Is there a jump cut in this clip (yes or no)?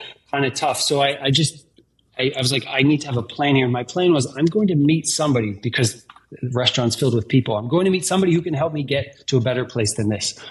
no